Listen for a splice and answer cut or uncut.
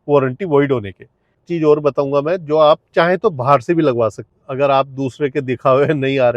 cut